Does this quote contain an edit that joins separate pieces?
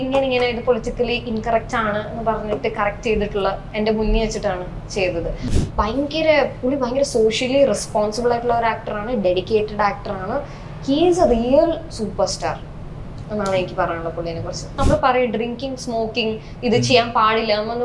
yes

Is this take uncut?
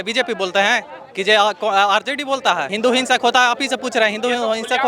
no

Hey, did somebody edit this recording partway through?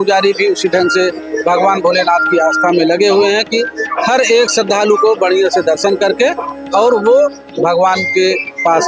no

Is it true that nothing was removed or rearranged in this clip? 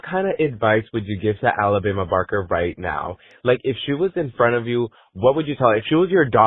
yes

